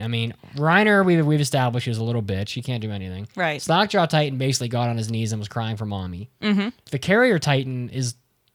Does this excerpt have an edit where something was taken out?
yes; 1 cut; at 6.8 s

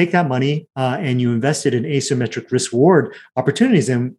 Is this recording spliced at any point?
no; 0 cuts

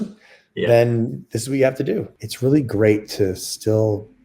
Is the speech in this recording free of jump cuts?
no; 1 cut; at 2.2 s

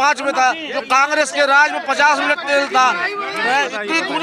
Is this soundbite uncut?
yes; 0 cuts

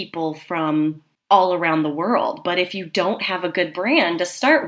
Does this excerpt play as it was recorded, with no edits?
no; 1 cut; at 1.1 s

